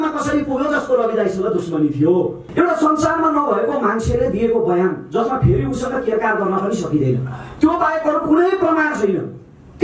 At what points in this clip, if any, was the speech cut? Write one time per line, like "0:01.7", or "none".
0:02.4